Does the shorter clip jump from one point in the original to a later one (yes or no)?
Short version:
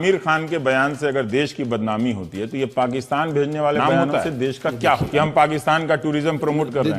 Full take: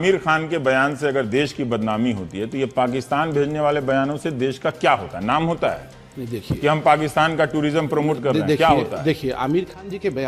yes